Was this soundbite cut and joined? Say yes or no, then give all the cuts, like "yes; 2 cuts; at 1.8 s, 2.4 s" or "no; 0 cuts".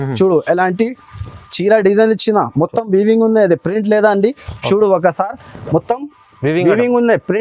no; 0 cuts